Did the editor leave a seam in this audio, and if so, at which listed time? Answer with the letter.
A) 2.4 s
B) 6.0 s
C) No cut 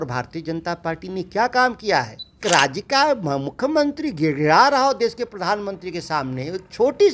A